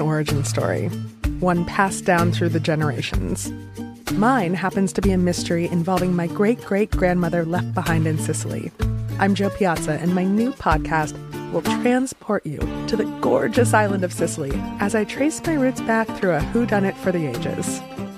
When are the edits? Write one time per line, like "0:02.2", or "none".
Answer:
none